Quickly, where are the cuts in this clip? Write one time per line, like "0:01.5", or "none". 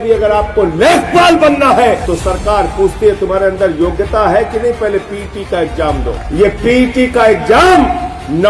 0:02.0
0:06.2